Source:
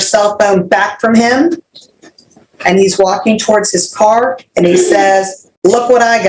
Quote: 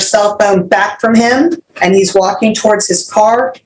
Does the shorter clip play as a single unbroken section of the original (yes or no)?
no